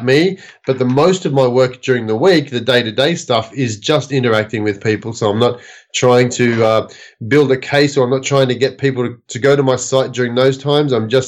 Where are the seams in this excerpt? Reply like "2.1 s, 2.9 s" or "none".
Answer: none